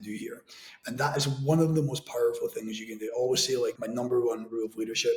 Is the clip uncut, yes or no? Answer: yes